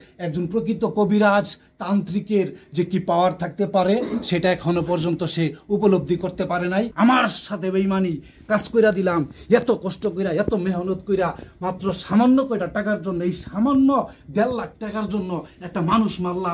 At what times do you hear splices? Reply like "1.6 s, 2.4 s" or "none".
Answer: 6.9 s